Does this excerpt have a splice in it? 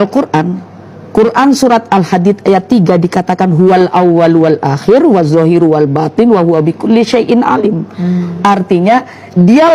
no; 0 cuts

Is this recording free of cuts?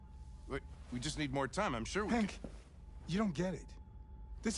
yes; 0 cuts

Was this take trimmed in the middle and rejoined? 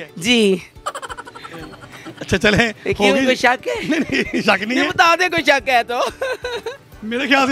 no; 0 cuts

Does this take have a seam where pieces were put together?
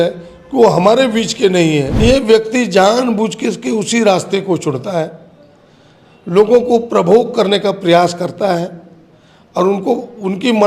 yes; 1 cut; at 2.0 s

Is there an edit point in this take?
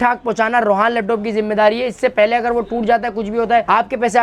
no; 0 cuts

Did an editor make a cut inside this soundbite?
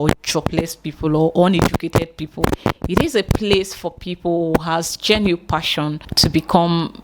yes; 1 cut; at 6.0 s

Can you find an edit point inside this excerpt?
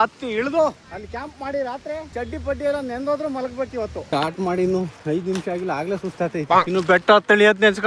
yes; 1 cut; at 4.0 s

